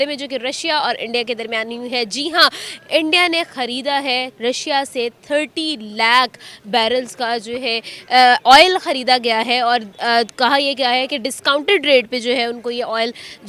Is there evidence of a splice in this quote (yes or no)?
no